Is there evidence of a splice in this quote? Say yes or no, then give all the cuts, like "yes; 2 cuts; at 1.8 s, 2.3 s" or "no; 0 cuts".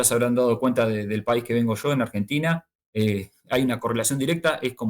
yes; 1 cut; at 2.8 s